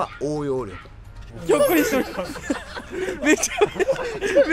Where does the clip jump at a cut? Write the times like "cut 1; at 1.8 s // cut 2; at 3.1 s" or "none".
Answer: cut 1; at 1.3 s